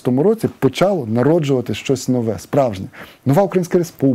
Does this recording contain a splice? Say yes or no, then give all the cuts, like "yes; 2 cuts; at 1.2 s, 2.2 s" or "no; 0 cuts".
no; 0 cuts